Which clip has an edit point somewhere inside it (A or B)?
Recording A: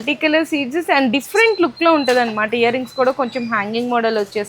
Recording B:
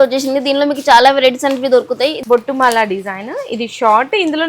B